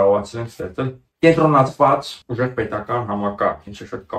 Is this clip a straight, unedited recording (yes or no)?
no